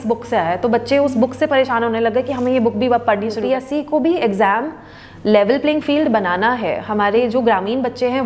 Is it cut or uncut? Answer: cut